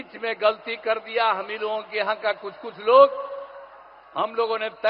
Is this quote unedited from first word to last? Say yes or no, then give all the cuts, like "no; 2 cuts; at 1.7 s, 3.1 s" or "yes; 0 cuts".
yes; 0 cuts